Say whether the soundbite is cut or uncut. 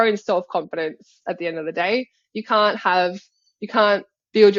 uncut